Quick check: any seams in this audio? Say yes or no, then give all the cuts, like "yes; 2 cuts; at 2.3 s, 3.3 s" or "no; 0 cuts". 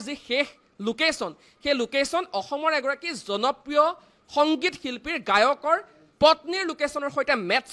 no; 0 cuts